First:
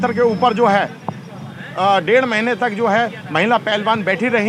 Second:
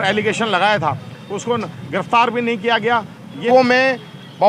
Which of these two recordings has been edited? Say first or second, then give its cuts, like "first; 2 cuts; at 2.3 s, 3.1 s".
second; 1 cut; at 3.5 s